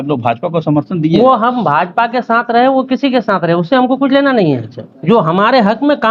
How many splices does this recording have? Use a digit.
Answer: 0